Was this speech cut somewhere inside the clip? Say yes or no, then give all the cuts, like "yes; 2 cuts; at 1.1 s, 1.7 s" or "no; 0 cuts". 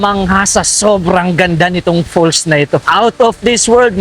yes; 1 cut; at 2.9 s